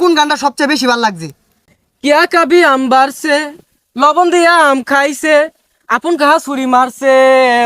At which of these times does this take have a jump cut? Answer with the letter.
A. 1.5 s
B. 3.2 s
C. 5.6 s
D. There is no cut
A